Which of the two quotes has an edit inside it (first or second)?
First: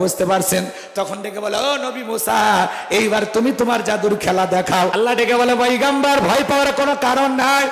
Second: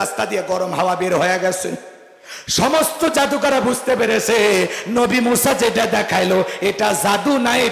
first